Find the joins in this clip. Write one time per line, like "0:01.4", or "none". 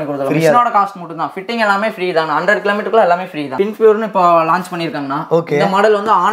0:03.5

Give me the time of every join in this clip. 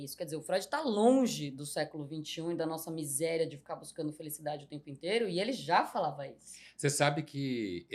none

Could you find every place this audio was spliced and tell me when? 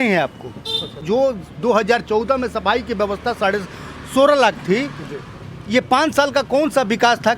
0:00.9

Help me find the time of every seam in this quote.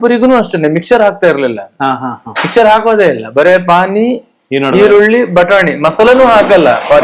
none

